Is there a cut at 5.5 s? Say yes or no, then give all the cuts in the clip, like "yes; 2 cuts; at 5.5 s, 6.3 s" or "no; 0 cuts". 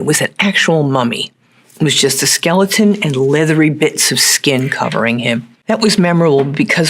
yes; 1 cut; at 5.5 s